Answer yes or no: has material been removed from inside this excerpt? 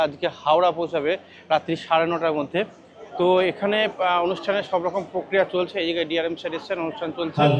no